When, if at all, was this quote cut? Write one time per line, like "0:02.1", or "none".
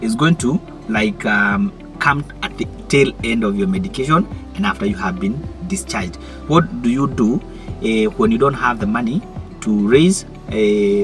0:06.3